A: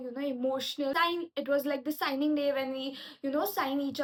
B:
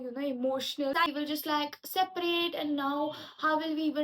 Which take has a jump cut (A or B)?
B